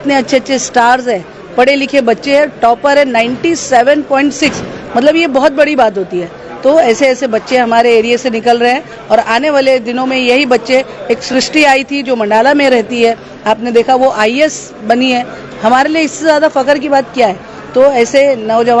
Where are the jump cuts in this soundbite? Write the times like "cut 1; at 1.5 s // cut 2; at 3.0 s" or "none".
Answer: none